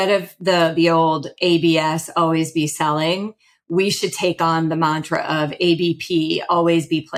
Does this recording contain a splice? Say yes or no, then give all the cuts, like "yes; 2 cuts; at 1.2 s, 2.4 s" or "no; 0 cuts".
no; 0 cuts